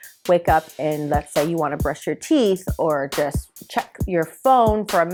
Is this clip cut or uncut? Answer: uncut